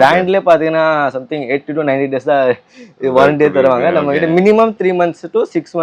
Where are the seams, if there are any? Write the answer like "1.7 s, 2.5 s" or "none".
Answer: none